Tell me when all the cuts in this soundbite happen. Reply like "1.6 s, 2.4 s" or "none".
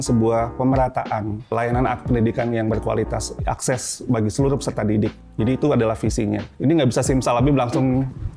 1.5 s, 6.5 s